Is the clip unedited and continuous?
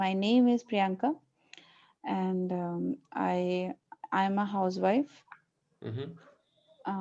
yes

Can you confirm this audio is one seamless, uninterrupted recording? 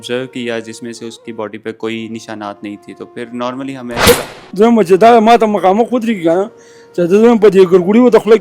no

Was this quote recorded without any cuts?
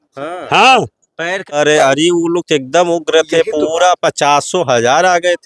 no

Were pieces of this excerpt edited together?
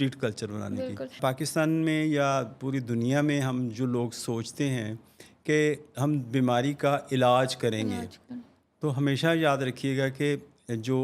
yes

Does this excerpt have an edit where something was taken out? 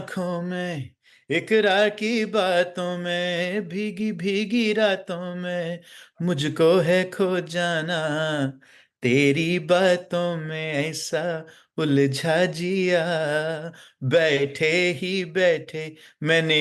no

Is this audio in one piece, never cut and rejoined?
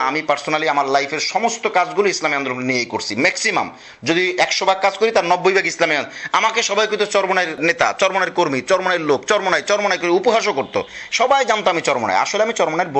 no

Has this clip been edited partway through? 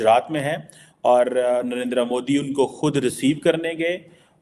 no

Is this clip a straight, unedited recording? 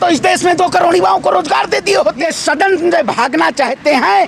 no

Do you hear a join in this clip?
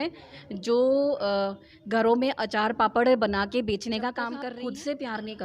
yes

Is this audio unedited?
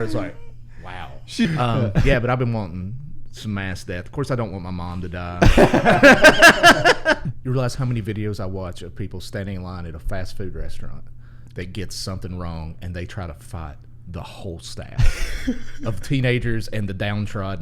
no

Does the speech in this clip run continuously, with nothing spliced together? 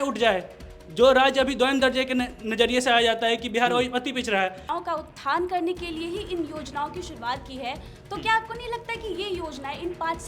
no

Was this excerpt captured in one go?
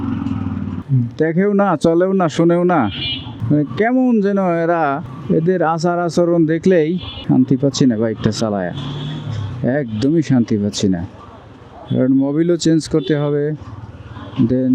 yes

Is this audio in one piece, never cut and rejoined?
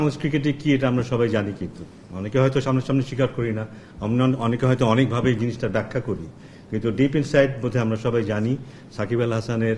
yes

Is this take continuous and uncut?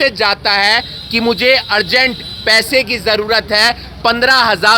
yes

